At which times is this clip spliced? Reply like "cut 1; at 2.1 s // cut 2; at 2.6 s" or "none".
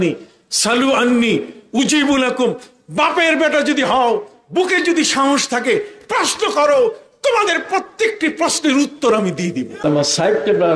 cut 1; at 9.8 s